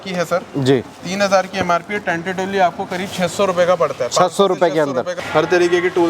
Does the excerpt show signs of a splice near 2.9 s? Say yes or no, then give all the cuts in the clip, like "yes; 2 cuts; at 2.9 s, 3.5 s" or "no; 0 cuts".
no; 1 cut; at 5.2 s